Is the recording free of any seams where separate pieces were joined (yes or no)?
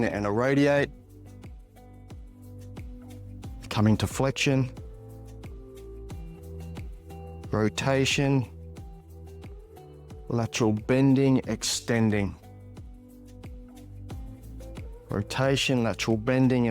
no